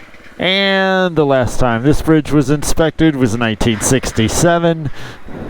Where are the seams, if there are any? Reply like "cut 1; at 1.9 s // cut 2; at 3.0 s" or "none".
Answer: none